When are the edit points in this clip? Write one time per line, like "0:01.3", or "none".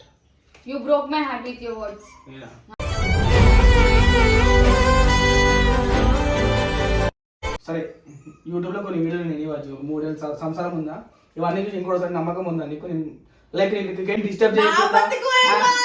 0:07.6